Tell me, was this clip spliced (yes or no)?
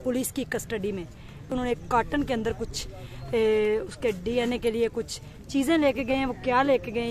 yes